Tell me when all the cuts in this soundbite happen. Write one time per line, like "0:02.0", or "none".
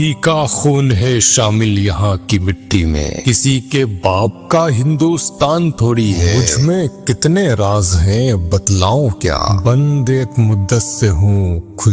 0:03.2
0:06.4
0:09.5